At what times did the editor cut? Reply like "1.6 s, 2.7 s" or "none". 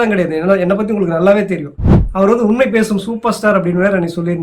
1.9 s